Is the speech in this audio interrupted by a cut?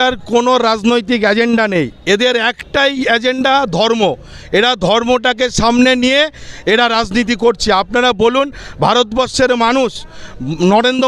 no; 0 cuts

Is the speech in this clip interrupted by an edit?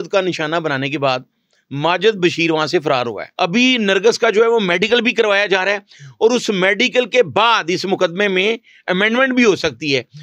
yes; 1 cut; at 3.2 s

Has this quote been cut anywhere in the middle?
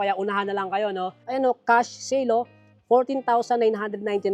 yes; 1 cut; at 1.2 s

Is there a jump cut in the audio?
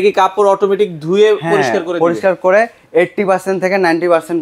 no; 0 cuts

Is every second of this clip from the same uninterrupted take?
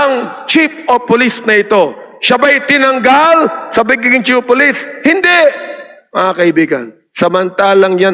yes; 0 cuts

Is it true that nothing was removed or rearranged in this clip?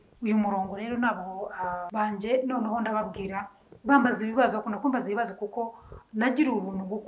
no; 1 cut; at 1.8 s

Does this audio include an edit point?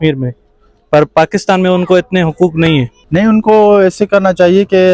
yes; 1 cut; at 3.0 s

